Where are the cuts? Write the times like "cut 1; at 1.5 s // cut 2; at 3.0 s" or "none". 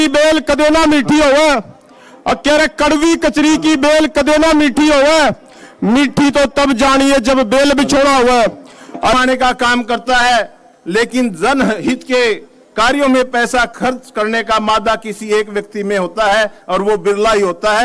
cut 1; at 9.1 s